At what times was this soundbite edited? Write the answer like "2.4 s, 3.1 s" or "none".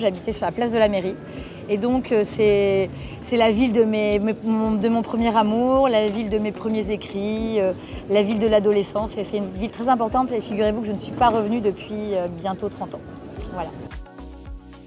13.9 s